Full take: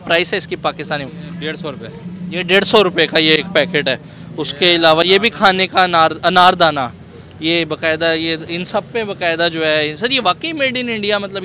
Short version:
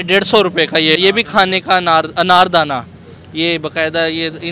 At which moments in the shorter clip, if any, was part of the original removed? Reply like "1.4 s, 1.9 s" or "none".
1.0 s